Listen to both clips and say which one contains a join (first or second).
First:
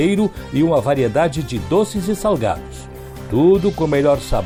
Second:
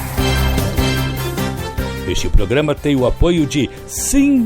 second